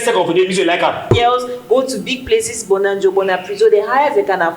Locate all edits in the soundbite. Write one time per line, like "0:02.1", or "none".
0:01.1